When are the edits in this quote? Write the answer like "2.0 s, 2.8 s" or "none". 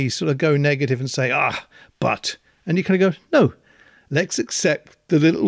none